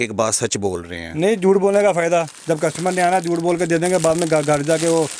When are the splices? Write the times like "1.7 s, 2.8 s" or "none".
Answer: none